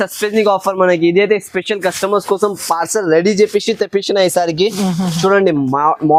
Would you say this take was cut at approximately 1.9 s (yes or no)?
no